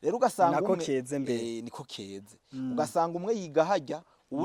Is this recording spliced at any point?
no; 0 cuts

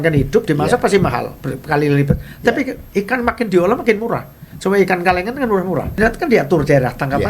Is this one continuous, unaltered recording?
no; 1 cut; at 5.9 s

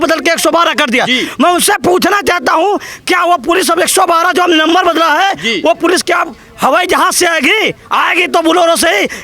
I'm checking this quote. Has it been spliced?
no; 0 cuts

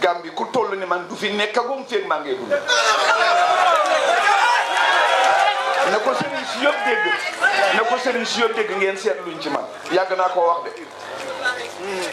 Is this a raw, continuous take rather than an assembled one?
yes; 0 cuts

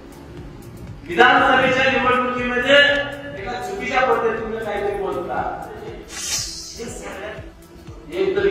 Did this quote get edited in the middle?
yes; 1 cut; at 7.4 s

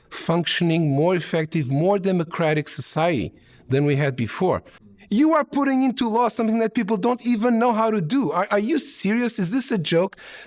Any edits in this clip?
yes; 1 cut; at 4.8 s

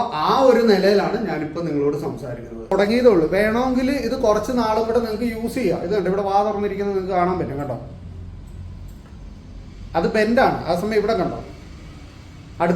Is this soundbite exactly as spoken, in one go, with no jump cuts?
no; 1 cut; at 2.7 s

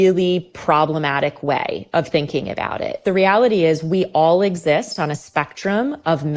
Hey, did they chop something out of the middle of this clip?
yes; 1 cut; at 3.0 s

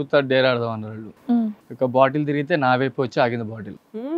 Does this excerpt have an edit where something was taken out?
yes; 1 cut; at 1.4 s

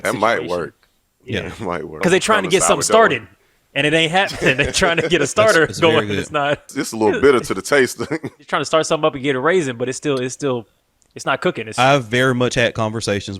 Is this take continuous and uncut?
no; 4 cuts; at 2.0 s, 6.8 s, 8.4 s, 11.5 s

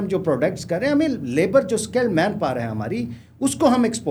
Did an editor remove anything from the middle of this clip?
no; 0 cuts

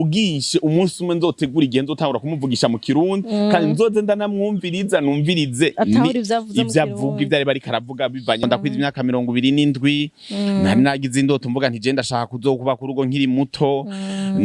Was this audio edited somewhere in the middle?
yes; 1 cut; at 8.4 s

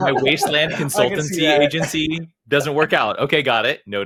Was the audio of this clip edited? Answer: no; 0 cuts

